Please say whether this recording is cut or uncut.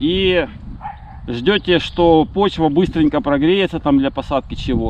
uncut